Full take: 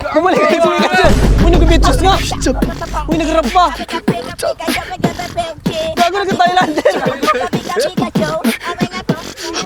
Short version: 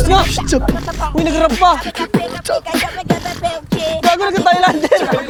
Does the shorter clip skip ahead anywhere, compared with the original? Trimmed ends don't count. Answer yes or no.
no